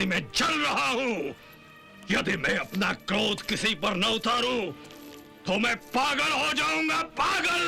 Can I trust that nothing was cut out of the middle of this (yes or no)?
yes